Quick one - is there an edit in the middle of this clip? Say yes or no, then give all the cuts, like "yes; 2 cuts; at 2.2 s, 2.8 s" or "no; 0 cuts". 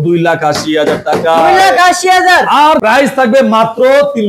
yes; 1 cut; at 2.8 s